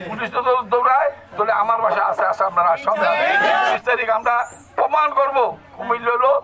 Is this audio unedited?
no; 1 cut; at 3.8 s

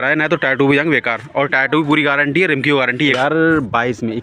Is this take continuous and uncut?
no; 1 cut; at 3.2 s

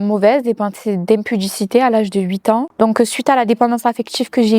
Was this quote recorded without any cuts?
no; 1 cut; at 2.7 s

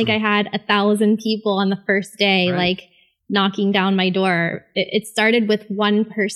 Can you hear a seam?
no; 0 cuts

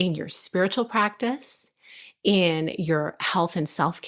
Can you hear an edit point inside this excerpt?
no; 0 cuts

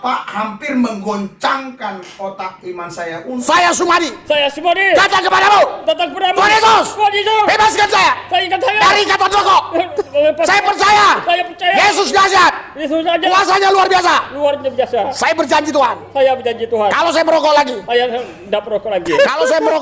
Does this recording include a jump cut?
yes; 1 cut; at 3.4 s

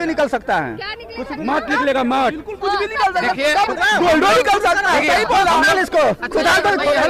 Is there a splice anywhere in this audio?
no; 0 cuts

